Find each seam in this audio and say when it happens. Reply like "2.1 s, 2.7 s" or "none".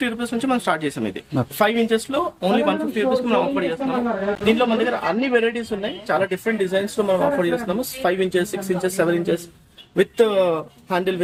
none

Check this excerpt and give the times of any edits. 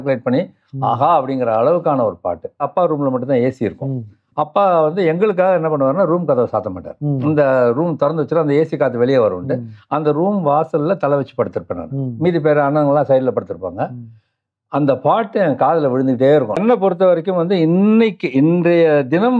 2.7 s, 16.6 s

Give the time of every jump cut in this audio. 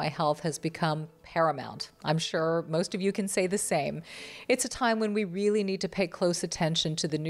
none

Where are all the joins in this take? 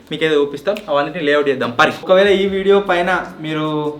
2.0 s

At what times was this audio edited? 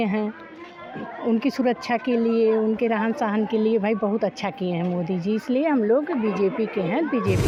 none

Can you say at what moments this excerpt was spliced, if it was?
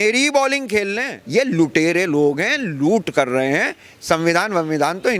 1.1 s

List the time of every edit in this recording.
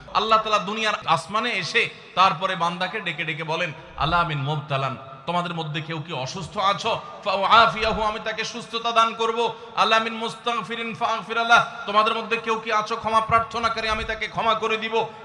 1.0 s

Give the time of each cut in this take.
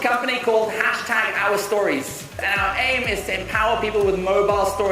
2.4 s

